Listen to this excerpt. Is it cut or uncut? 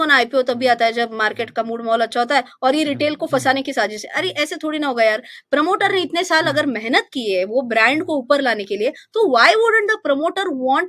uncut